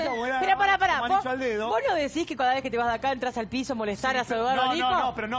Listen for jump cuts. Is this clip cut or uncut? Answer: cut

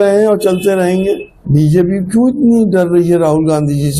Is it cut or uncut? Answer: cut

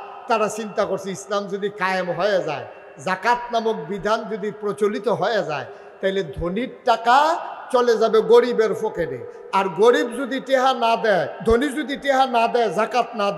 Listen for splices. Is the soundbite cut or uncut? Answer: uncut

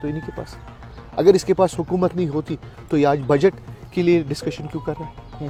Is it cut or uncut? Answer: uncut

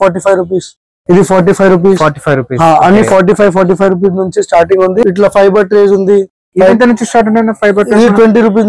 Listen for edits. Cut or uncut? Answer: cut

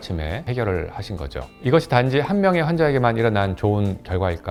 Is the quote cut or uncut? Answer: uncut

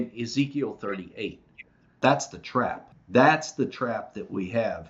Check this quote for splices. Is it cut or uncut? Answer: cut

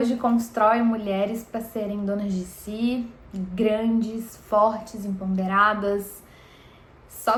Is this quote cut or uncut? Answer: uncut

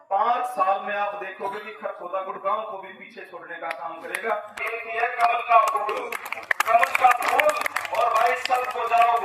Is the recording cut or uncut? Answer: cut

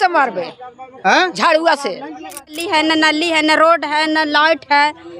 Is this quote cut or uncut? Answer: cut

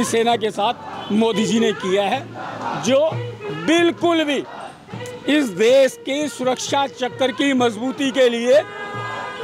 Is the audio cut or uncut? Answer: uncut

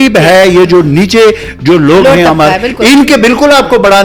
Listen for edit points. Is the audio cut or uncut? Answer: uncut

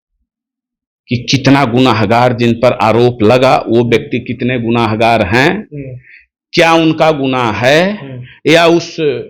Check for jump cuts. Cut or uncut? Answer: uncut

